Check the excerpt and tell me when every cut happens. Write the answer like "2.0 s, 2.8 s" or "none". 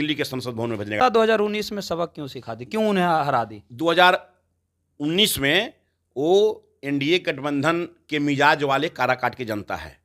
1.0 s

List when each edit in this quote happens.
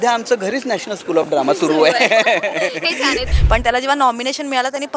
3.3 s

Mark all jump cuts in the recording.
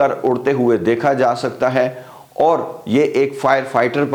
none

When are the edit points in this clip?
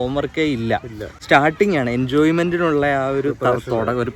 none

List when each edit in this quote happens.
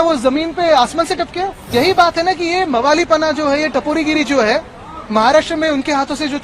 1.6 s

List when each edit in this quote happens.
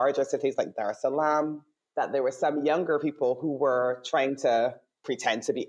none

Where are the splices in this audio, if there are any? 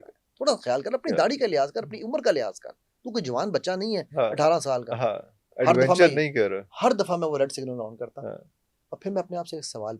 none

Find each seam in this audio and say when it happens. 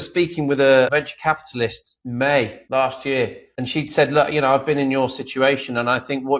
0.9 s, 1.9 s, 2.6 s, 3.4 s

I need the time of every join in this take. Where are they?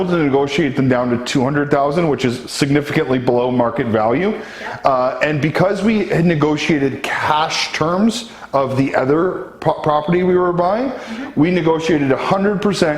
none

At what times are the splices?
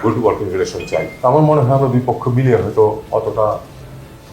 1.1 s

